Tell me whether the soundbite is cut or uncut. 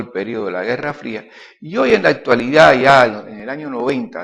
cut